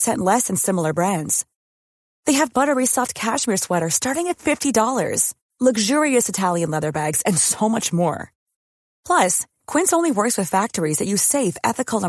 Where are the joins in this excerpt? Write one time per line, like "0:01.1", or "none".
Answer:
none